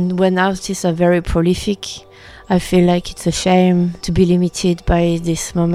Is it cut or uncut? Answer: cut